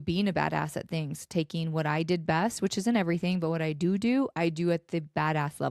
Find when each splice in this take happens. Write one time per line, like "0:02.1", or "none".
none